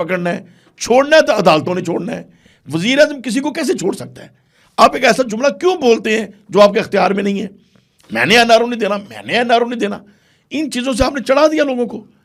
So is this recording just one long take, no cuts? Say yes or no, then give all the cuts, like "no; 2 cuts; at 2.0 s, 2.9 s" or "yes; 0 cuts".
yes; 0 cuts